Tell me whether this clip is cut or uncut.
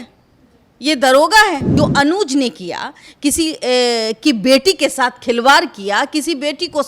cut